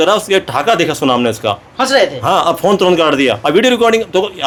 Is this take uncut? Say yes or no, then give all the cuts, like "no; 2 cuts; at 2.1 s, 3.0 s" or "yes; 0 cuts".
yes; 0 cuts